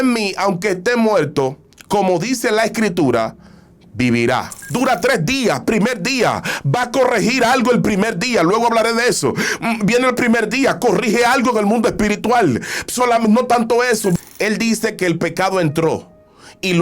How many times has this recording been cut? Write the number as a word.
two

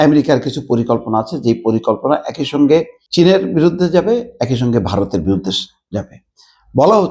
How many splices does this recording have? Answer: one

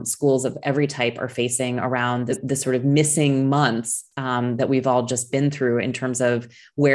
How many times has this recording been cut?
one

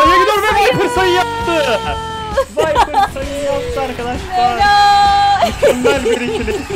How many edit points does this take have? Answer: zero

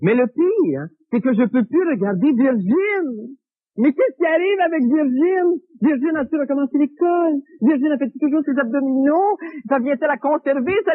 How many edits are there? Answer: one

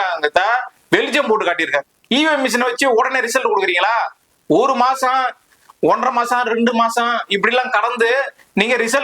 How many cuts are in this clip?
one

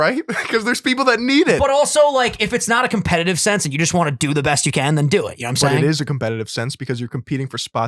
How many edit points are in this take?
zero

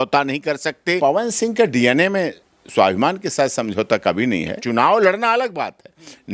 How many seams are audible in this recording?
two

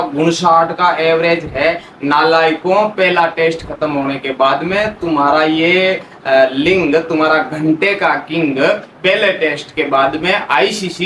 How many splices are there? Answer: zero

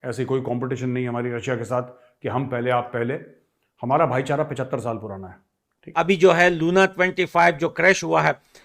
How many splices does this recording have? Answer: one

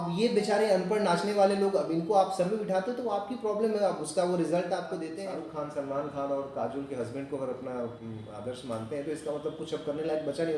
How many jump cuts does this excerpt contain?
one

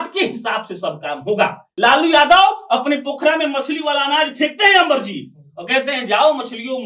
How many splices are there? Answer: one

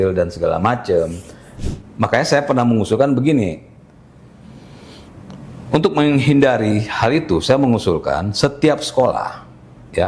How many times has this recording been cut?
one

